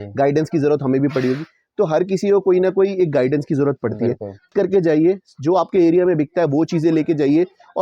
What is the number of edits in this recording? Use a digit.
1